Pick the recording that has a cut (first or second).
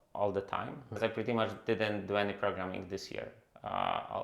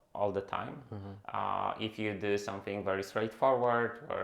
first